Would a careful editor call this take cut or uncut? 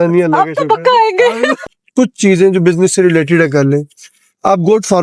cut